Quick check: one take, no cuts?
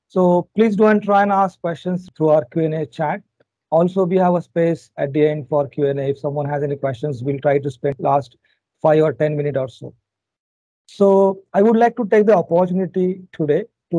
no; 2 cuts; at 2.0 s, 8.0 s

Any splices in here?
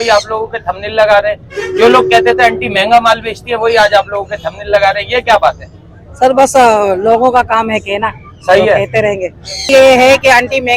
yes; 1 cut; at 9.5 s

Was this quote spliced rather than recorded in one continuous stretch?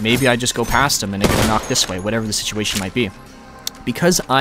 no; 0 cuts

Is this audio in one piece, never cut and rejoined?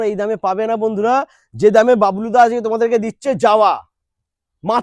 yes; 0 cuts

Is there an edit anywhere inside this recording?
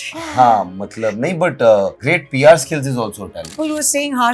yes; 2 cuts; at 2.0 s, 3.5 s

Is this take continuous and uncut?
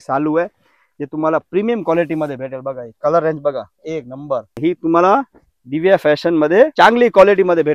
no; 2 cuts; at 4.5 s, 6.7 s

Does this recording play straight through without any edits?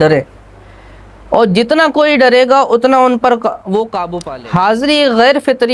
no; 1 cut; at 4.0 s

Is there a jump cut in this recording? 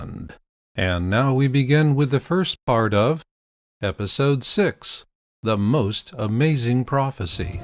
no; 0 cuts

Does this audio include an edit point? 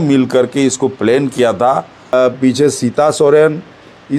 yes; 1 cut; at 2.1 s

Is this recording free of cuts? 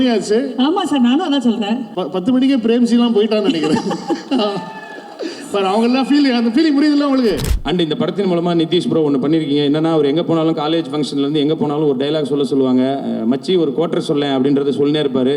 no; 2 cuts; at 1.9 s, 7.5 s

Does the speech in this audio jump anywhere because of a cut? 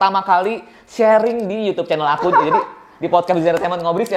no; 0 cuts

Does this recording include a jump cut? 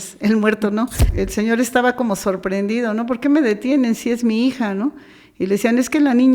yes; 1 cut; at 1.1 s

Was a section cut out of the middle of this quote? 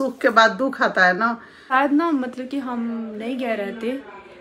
yes; 1 cut; at 1.7 s

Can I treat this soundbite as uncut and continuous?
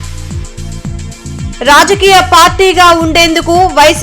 yes; 0 cuts

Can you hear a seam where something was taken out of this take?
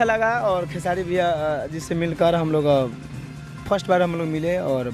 no; 0 cuts

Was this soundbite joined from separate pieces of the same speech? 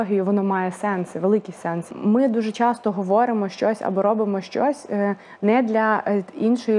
yes; 1 cut; at 1.8 s

